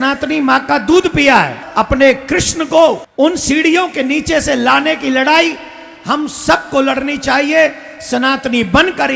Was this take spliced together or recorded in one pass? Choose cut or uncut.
cut